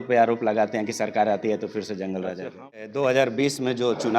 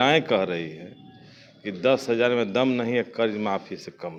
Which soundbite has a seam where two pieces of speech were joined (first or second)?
first